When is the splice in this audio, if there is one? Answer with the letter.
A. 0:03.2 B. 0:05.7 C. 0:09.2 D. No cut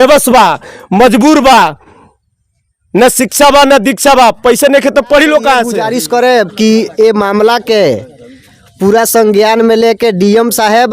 B